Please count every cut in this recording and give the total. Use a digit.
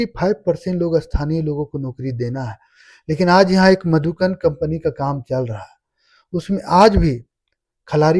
0